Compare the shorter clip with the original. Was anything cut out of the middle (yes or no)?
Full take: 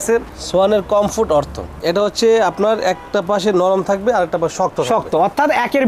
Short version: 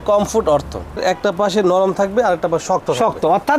yes